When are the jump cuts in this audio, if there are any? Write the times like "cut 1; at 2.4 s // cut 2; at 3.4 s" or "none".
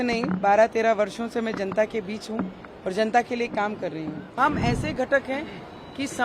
cut 1; at 4.4 s

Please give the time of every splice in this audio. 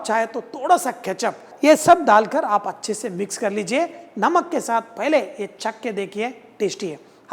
none

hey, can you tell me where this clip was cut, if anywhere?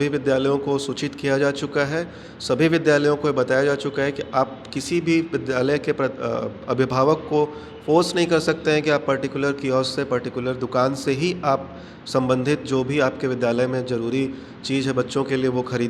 none

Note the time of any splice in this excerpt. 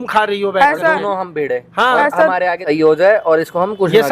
cut 1; at 2.6 s

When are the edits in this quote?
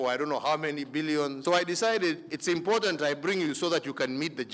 cut 1; at 1.4 s

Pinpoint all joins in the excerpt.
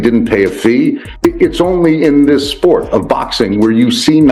cut 1; at 1.1 s

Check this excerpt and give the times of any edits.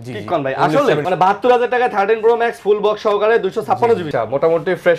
cut 1; at 1.0 s // cut 2; at 4.1 s

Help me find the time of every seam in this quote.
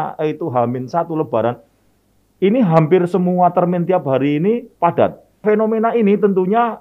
cut 1; at 5.4 s

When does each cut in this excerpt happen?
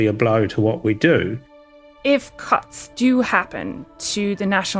cut 1; at 1.4 s

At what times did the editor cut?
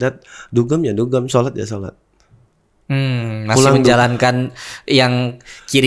none

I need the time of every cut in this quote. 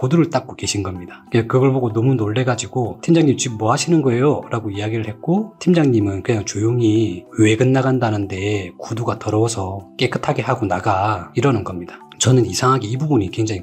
cut 1; at 12.1 s

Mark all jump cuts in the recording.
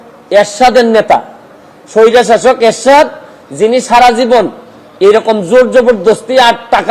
none

